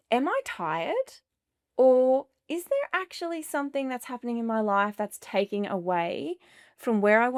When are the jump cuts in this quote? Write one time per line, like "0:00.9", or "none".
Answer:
none